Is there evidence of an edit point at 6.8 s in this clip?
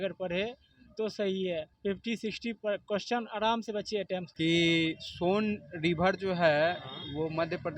no; 1 cut; at 4.2 s

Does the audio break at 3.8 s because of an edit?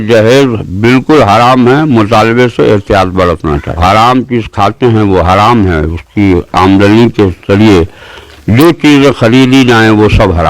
yes; 1 cut; at 3.8 s

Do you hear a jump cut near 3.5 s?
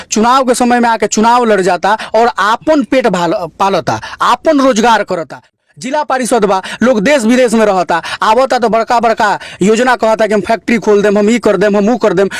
no; 1 cut; at 5.5 s

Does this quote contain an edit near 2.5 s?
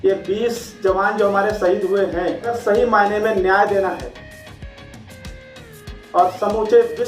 yes; 1 cut; at 2.5 s

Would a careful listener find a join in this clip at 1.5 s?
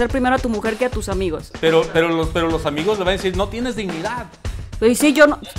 yes; 1 cut; at 1.5 s

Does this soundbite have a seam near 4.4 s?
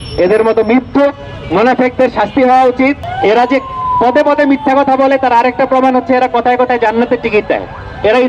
no; 1 cut; at 3.1 s

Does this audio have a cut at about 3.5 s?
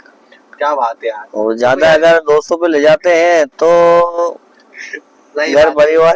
no; 0 cuts

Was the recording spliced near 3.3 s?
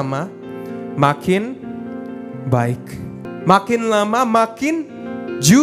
yes; 1 cut; at 3.3 s

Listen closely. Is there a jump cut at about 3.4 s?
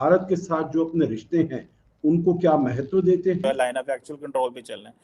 yes; 1 cut; at 3.4 s

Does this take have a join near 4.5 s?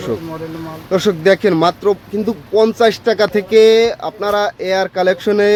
no; 0 cuts

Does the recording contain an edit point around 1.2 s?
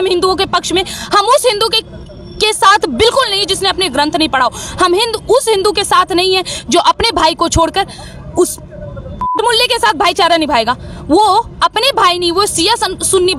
no; 0 cuts

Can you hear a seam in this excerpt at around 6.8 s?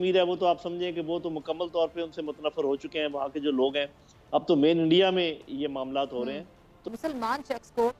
yes; 1 cut; at 6.8 s

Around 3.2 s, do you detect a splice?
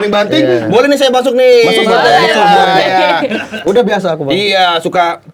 no; 0 cuts

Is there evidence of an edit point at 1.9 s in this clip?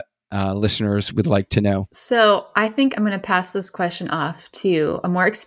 yes; 1 cut; at 1.9 s

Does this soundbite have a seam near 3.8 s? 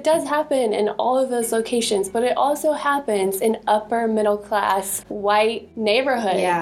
no; 0 cuts

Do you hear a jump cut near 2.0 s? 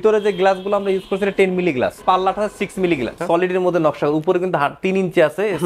yes; 2 cuts; at 2.0 s, 3.2 s

